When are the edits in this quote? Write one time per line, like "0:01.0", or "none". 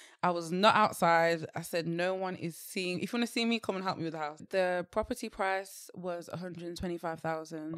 0:04.4